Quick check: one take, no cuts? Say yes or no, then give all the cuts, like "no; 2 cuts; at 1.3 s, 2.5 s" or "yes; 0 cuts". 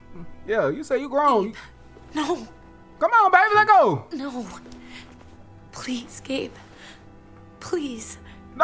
yes; 0 cuts